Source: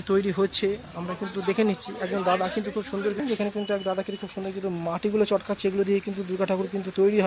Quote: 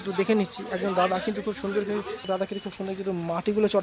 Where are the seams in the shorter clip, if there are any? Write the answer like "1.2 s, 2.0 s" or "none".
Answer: 1.9 s